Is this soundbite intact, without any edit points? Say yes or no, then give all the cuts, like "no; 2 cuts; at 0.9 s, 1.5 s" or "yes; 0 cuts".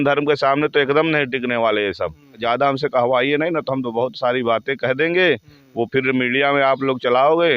no; 1 cut; at 2.4 s